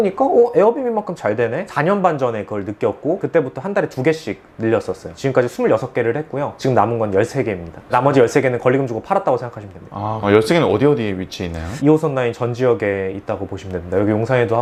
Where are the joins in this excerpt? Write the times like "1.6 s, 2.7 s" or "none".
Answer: none